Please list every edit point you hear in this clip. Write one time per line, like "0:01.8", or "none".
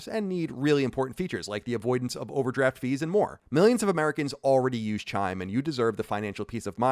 0:03.4

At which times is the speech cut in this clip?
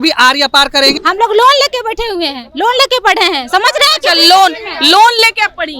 0:01.0

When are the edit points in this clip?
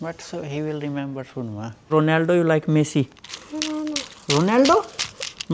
0:01.8

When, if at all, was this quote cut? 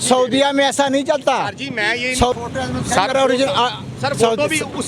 0:02.3

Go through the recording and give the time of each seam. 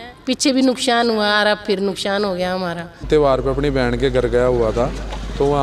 0:03.1

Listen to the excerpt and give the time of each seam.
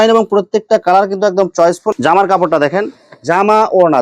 0:01.9

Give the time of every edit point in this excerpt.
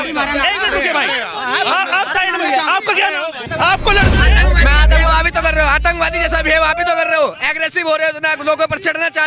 0:03.4

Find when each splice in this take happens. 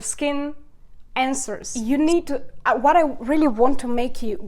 0:01.7

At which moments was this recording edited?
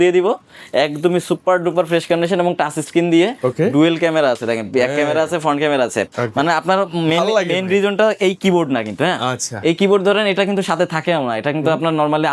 none

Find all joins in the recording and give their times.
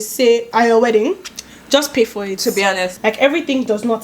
0:02.9

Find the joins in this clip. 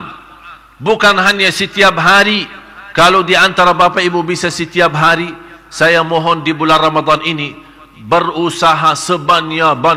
none

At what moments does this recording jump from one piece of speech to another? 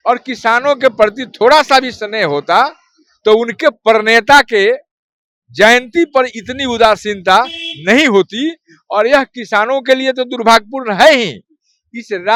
none

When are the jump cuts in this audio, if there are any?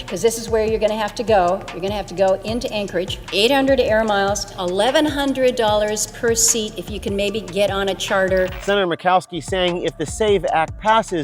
none

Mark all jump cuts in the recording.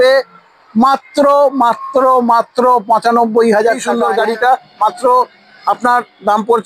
0:04.0

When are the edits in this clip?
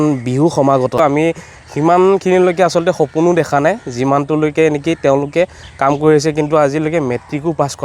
0:01.0

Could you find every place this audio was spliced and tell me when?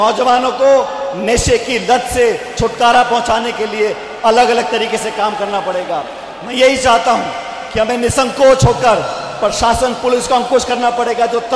none

